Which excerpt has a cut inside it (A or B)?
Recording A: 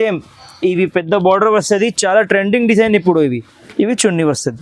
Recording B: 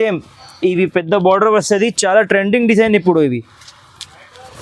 A